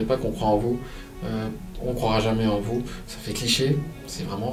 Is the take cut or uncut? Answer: uncut